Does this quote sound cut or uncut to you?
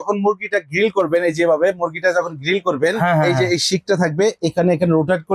uncut